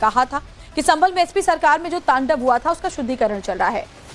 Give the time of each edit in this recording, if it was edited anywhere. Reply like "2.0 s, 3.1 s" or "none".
1.4 s